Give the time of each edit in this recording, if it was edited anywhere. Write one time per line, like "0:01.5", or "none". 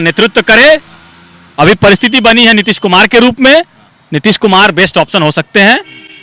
none